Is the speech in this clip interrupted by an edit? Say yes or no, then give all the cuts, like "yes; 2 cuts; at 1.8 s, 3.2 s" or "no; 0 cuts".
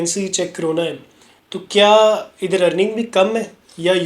no; 0 cuts